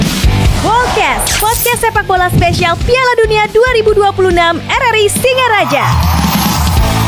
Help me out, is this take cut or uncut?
uncut